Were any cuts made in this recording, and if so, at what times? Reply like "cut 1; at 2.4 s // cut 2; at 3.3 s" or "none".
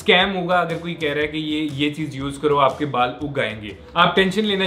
cut 1; at 3.8 s